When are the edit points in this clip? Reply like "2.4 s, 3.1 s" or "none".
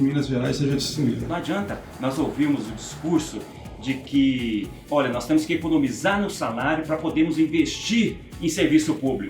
1.2 s